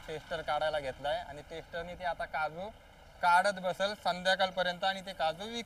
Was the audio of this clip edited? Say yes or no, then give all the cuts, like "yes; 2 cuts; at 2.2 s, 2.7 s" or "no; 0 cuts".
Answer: no; 0 cuts